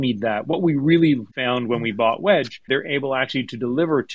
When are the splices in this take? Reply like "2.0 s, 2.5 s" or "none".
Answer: 1.3 s, 2.7 s